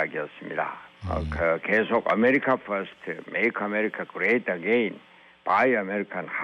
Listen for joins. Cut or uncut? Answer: cut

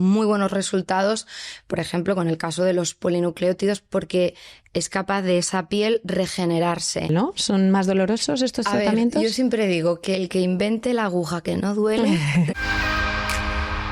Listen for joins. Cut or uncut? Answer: cut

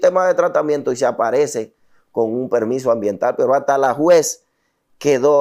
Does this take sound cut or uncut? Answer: uncut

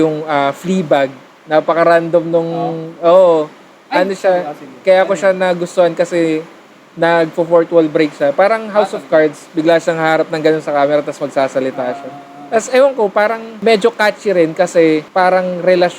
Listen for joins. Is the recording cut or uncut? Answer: cut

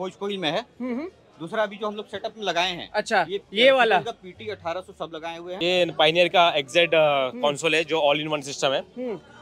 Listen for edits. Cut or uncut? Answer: cut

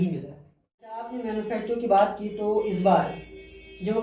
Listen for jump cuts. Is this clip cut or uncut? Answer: cut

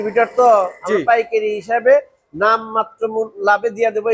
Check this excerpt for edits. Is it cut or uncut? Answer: uncut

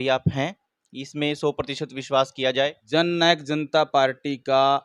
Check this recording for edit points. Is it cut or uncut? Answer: cut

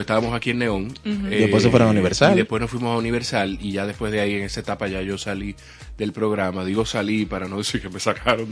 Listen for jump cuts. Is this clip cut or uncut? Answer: uncut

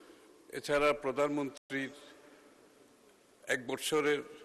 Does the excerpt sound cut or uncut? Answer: uncut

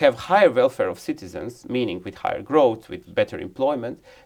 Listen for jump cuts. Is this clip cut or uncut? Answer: uncut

